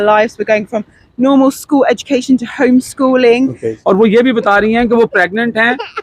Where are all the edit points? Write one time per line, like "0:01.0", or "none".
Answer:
0:03.7